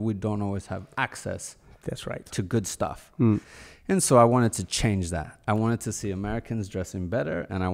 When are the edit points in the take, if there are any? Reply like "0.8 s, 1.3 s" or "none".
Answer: 3.5 s

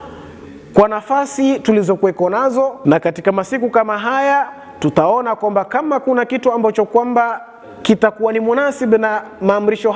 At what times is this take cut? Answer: 2.8 s

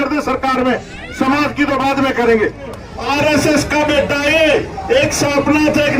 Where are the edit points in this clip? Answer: 2.9 s

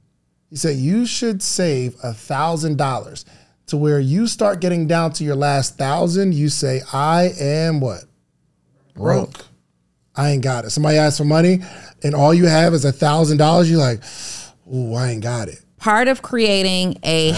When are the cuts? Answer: 15.6 s

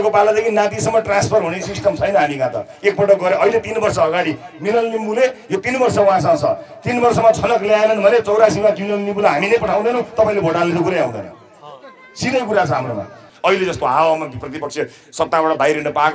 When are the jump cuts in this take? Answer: 13.2 s

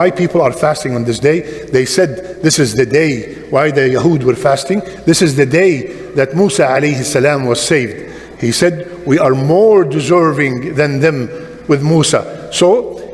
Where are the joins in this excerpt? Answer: none

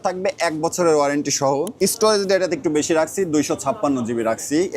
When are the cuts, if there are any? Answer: 1.7 s

